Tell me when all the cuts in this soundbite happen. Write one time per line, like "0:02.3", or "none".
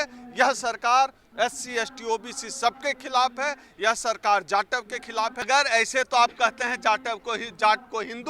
0:05.5